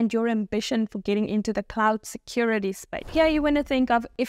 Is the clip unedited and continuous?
yes; 0 cuts

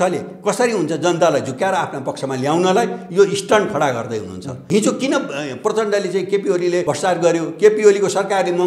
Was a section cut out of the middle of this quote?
yes; 2 cuts; at 4.6 s, 6.8 s

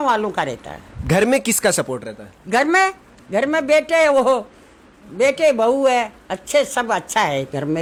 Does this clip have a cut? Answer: no; 0 cuts

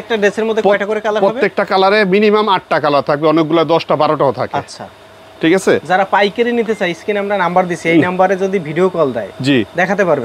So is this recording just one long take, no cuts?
yes; 0 cuts

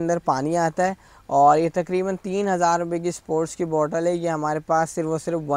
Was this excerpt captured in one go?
yes; 0 cuts

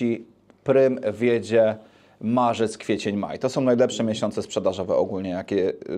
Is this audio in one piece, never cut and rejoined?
yes; 0 cuts

